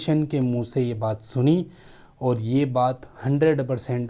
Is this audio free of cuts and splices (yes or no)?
yes